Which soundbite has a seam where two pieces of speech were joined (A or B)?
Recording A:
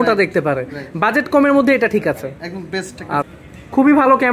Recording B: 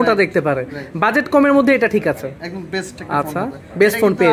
A